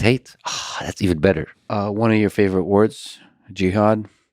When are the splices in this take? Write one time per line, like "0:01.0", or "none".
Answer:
0:01.5